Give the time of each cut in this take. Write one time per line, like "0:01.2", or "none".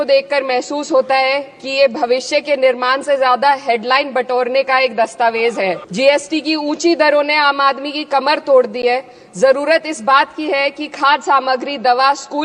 0:05.9